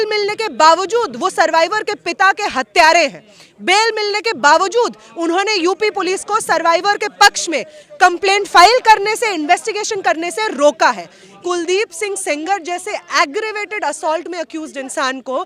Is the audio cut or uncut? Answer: cut